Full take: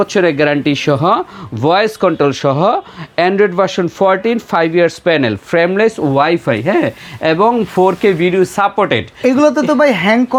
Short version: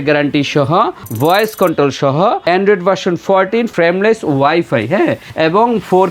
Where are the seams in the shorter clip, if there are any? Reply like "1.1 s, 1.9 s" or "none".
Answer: 1.0 s, 2.4 s, 3.7 s, 5.2 s